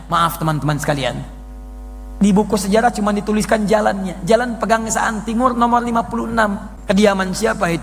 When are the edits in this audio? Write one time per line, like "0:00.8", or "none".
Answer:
0:06.7